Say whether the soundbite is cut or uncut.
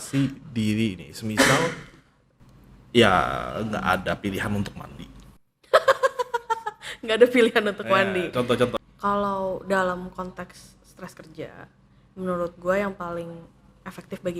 cut